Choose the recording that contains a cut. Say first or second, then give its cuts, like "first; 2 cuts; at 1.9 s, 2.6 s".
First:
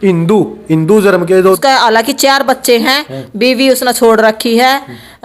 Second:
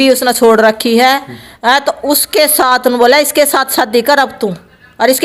first; 1 cut; at 1.6 s